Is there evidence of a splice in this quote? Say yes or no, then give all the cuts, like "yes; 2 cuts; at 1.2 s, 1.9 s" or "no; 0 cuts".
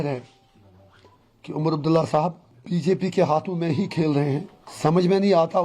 yes; 2 cuts; at 2.5 s, 4.6 s